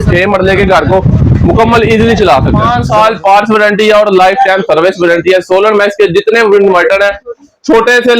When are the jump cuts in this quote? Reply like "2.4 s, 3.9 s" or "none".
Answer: 2.6 s